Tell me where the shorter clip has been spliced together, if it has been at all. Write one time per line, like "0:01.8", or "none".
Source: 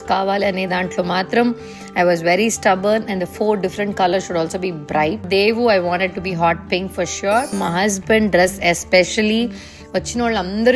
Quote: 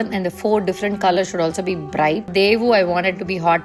none